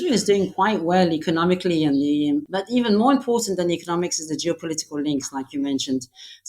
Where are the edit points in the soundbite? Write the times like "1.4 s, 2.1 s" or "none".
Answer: 2.5 s